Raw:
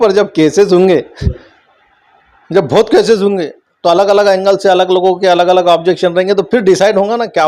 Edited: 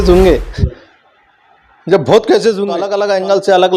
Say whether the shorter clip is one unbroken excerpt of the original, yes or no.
no